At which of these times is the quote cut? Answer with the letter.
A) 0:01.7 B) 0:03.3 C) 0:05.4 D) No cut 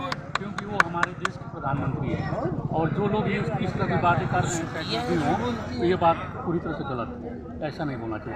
D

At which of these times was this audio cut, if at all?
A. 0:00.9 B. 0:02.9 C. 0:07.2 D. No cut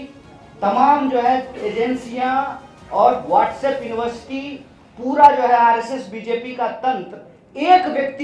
D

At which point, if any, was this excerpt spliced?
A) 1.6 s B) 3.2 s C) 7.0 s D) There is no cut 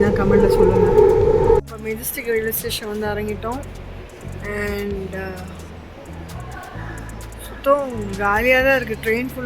A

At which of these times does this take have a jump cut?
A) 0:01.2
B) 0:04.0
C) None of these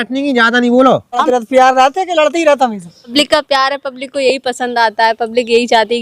A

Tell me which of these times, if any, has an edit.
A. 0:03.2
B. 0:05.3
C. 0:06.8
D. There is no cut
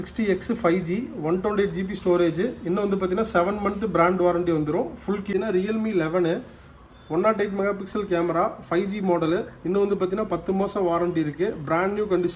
B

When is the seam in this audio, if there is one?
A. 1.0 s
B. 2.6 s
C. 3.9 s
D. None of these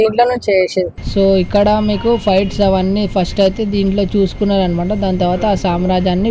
A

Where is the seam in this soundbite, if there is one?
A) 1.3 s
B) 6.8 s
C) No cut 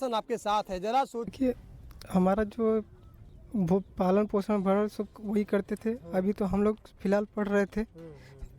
A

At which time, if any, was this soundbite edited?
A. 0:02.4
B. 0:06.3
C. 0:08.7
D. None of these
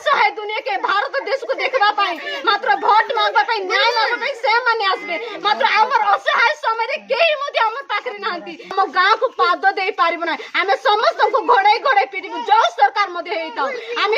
C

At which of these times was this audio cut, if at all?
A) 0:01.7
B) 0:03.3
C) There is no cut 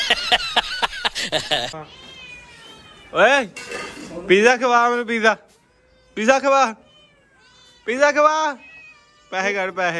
A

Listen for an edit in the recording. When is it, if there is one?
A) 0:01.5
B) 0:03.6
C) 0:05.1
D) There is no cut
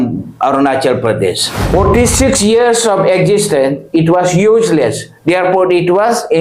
A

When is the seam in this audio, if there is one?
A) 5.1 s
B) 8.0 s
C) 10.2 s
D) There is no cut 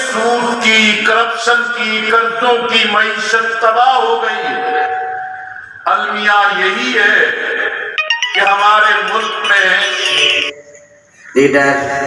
C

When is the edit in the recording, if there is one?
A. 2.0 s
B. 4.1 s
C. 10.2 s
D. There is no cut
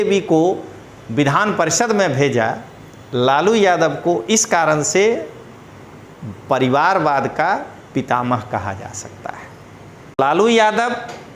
C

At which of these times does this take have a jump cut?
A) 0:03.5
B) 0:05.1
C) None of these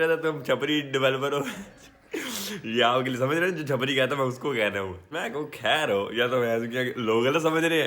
B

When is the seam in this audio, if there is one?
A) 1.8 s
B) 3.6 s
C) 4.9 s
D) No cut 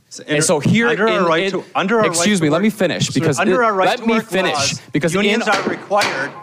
D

